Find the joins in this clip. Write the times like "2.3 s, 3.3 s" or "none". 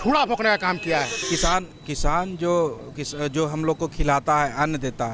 1.2 s